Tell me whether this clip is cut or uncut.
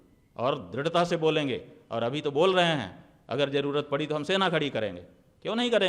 uncut